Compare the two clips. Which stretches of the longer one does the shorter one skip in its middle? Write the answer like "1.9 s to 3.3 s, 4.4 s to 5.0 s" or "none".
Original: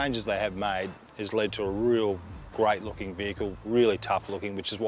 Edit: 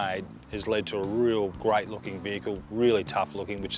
2.2 s to 2.5 s